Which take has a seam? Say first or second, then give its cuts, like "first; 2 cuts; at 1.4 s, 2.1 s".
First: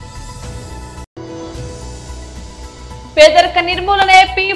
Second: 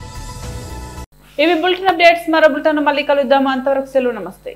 first; 2 cuts; at 1.1 s, 3.0 s